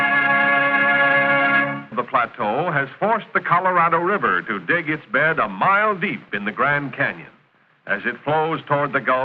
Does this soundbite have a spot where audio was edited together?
no; 0 cuts

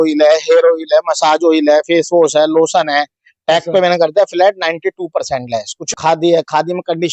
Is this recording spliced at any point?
yes; 1 cut; at 5.8 s

